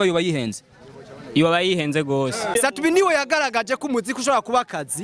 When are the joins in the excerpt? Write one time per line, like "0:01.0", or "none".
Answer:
0:02.6